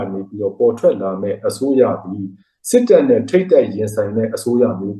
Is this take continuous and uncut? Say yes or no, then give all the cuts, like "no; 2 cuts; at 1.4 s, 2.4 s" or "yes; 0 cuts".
yes; 0 cuts